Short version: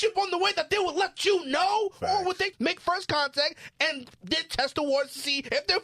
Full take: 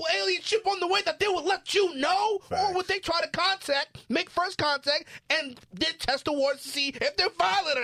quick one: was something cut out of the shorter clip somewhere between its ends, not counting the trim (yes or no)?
yes